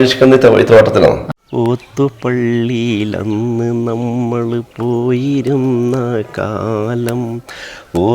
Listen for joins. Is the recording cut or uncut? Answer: cut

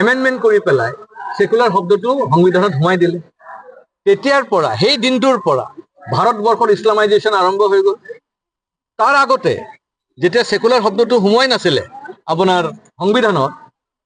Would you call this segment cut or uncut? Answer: uncut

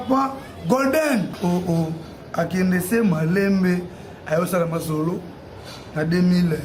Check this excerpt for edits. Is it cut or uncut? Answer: cut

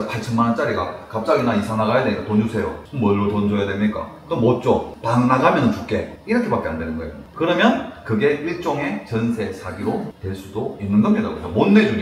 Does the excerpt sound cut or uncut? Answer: uncut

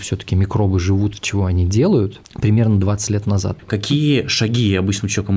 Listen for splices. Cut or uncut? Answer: cut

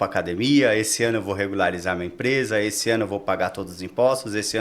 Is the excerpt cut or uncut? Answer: uncut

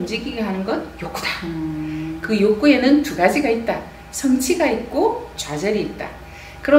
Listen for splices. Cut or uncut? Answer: uncut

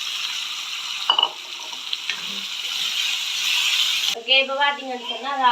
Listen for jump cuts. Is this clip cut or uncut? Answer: cut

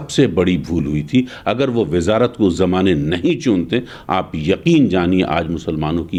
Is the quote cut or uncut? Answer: uncut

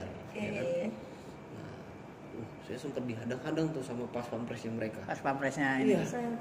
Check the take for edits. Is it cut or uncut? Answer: uncut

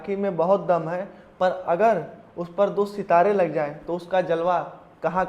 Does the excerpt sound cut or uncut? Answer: uncut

